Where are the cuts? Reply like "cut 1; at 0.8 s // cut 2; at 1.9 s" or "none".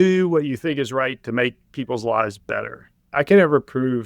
cut 1; at 3.0 s